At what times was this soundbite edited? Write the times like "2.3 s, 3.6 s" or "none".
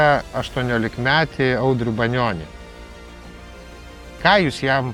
none